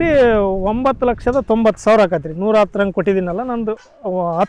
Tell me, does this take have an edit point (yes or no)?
no